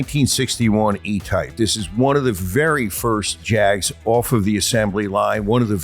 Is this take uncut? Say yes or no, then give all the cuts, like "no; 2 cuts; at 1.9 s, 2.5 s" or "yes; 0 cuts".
no; 2 cuts; at 1.5 s, 3.4 s